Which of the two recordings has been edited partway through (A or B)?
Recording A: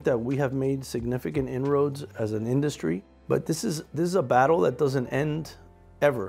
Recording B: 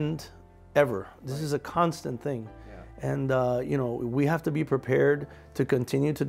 A